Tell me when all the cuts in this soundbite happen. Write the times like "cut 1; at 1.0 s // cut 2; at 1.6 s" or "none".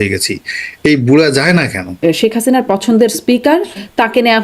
cut 1; at 2.0 s